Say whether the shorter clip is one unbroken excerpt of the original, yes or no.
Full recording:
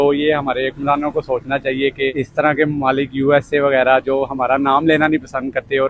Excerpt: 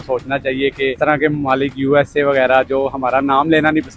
no